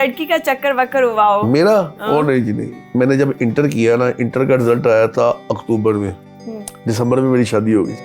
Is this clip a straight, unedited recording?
no; 1 cut; at 2.8 s

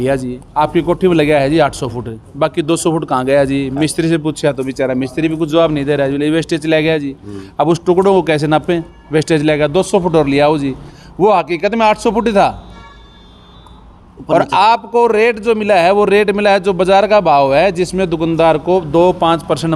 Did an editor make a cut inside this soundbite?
no; 0 cuts

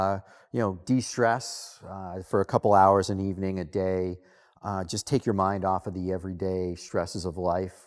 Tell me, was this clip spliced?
no; 0 cuts

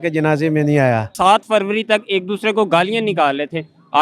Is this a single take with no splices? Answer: no; 1 cut; at 1.1 s

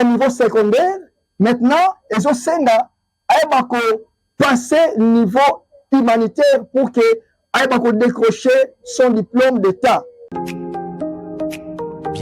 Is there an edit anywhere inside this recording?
yes; 1 cut; at 10.3 s

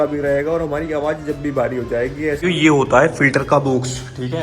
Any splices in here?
yes; 1 cut; at 2.4 s

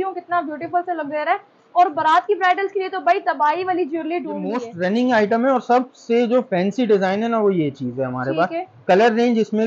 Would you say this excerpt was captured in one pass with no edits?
no; 1 cut; at 4.7 s

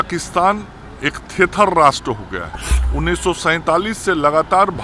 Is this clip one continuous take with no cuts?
yes; 0 cuts

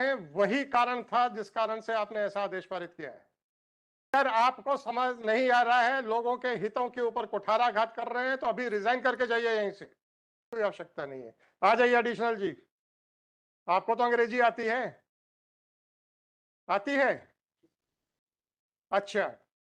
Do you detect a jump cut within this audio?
yes; 2 cuts; at 4.1 s, 10.4 s

